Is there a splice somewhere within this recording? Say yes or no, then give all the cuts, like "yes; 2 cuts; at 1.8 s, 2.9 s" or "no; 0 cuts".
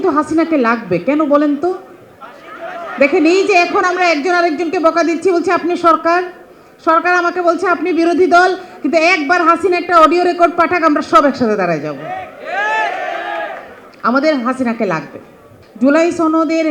no; 0 cuts